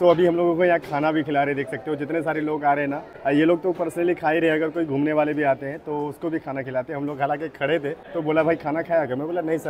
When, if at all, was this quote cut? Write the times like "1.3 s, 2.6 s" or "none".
none